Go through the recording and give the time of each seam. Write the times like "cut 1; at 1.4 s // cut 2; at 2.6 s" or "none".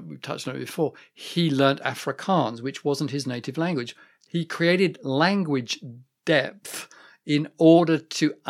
cut 1; at 4.2 s